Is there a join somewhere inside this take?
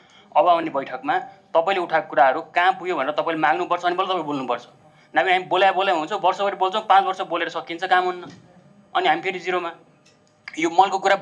no; 0 cuts

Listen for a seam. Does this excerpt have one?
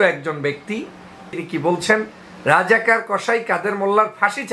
yes; 1 cut; at 1.3 s

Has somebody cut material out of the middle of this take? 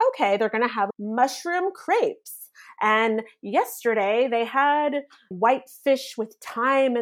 no; 0 cuts

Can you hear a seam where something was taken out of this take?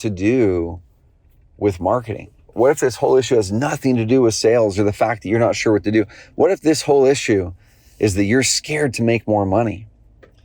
no; 0 cuts

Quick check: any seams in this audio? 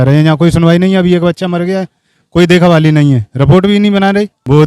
no; 0 cuts

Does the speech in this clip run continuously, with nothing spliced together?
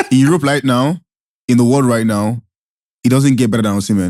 yes; 0 cuts

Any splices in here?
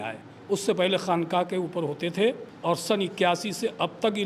yes; 1 cut; at 2.5 s

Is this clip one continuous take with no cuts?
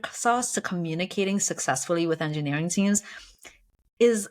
yes; 0 cuts

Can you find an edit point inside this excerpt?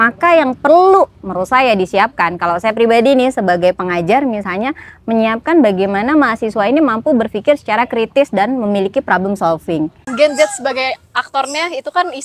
yes; 1 cut; at 10.1 s

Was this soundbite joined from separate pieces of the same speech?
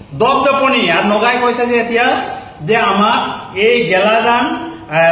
no; 0 cuts

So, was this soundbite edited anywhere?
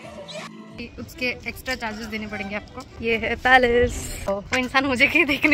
yes; 3 cuts; at 0.9 s, 2.9 s, 4.3 s

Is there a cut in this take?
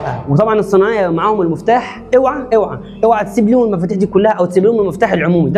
no; 0 cuts

